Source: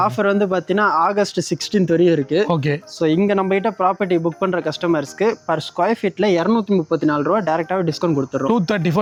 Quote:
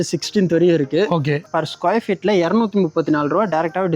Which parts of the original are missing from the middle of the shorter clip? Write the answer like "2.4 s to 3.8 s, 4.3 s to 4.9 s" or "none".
2.9 s to 5.4 s